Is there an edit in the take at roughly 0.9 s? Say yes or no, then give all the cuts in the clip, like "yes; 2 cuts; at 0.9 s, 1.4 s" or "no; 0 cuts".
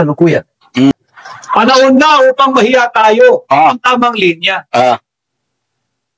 yes; 1 cut; at 0.9 s